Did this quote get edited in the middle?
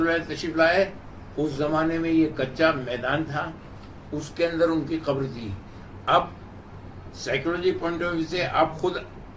no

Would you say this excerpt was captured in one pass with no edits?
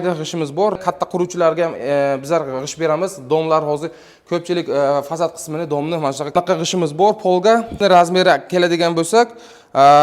no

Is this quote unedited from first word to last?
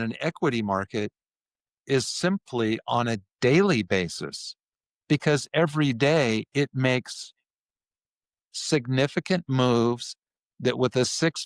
yes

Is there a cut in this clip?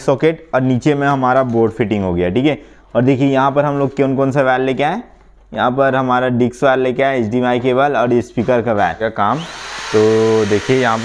yes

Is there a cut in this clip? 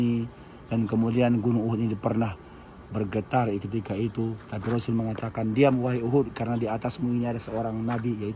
no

